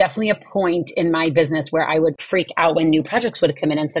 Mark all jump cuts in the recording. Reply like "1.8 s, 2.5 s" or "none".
2.2 s